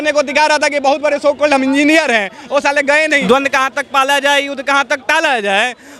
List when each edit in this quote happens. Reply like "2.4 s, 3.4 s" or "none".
3.2 s